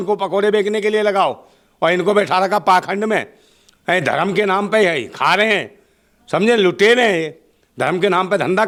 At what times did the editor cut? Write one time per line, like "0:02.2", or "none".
none